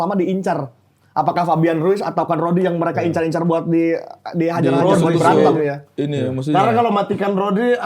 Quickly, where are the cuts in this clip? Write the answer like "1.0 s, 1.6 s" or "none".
none